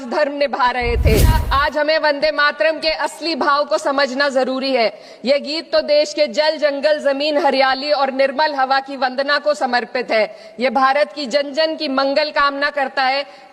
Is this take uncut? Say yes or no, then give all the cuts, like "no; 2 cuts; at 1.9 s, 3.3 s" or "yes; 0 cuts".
no; 1 cut; at 1.4 s